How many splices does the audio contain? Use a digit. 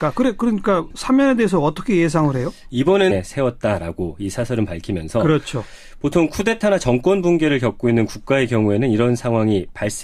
0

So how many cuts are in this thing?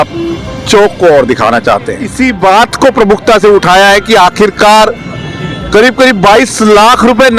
1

